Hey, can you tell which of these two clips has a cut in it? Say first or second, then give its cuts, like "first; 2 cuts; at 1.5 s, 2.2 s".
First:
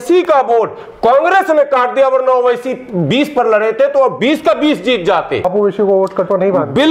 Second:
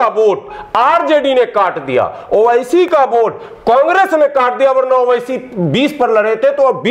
first; 1 cut; at 5.5 s